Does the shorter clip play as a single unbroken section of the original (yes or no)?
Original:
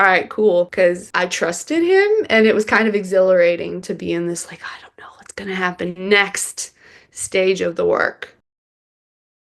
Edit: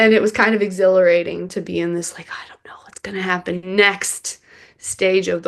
yes